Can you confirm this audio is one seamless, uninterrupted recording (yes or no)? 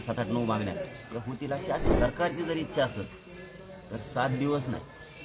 no